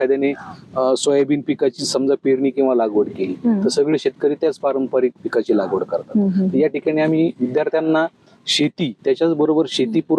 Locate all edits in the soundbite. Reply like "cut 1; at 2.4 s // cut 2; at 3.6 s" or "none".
none